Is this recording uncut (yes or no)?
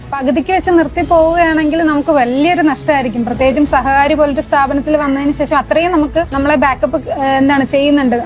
yes